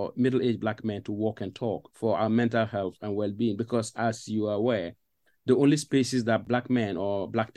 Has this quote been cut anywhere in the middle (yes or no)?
yes